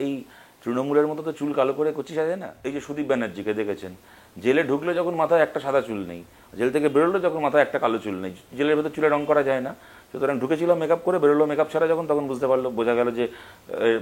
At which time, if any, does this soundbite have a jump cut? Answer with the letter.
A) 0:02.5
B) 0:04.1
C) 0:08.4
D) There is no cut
A